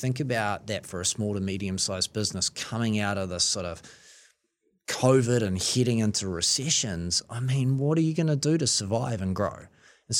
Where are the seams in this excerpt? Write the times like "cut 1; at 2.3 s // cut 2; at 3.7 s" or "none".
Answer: none